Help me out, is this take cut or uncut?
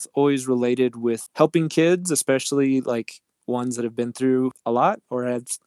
cut